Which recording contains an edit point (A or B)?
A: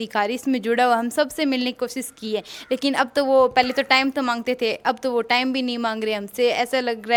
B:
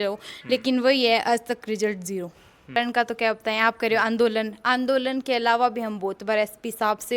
B